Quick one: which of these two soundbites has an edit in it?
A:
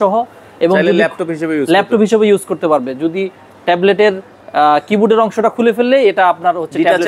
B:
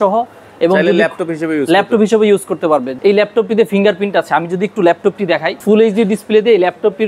B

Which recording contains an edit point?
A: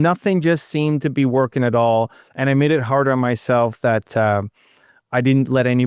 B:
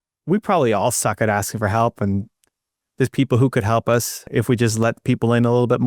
B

